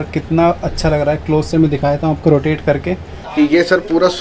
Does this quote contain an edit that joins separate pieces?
yes; 1 cut; at 3.1 s

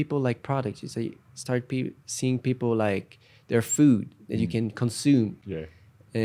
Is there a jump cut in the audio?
no; 0 cuts

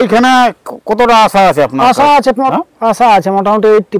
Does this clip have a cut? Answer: yes; 1 cut; at 2.5 s

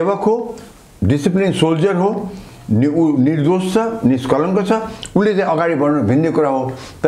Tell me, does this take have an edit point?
no; 0 cuts

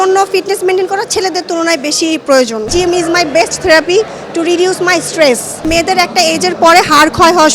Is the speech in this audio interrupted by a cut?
yes; 2 cuts; at 2.7 s, 5.6 s

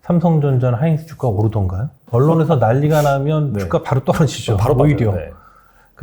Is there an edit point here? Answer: yes; 1 cut; at 2.0 s

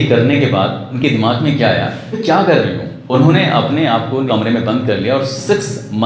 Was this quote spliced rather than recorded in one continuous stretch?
yes; 4 cuts; at 0.9 s, 2.2 s, 2.9 s, 4.2 s

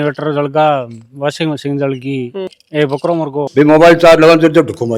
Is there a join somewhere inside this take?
yes; 1 cut; at 2.8 s

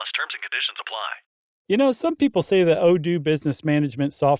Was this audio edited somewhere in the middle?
yes; 1 cut; at 1.2 s

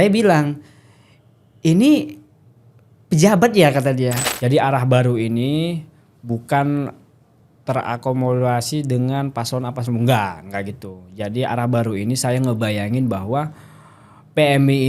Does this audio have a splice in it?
yes; 1 cut; at 4.2 s

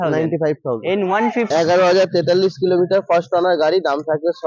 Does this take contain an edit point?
yes; 1 cut; at 1.5 s

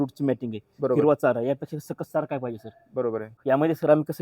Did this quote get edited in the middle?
yes; 1 cut; at 3.3 s

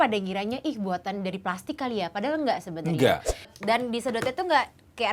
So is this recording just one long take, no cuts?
no; 1 cut; at 3.5 s

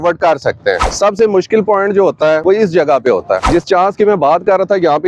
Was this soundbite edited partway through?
yes; 3 cuts; at 0.9 s, 2.4 s, 3.4 s

